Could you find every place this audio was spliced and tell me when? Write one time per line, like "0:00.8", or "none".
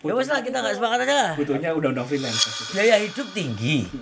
0:02.4